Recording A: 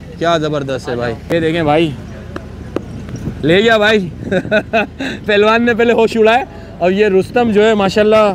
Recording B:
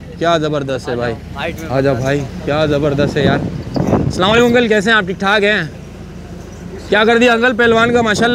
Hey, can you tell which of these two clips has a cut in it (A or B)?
A